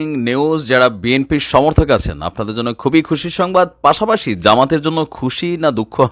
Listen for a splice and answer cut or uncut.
uncut